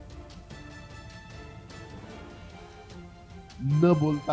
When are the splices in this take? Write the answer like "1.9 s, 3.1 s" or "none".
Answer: 3.1 s